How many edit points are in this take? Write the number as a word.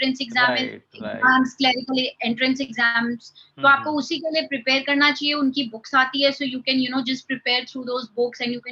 zero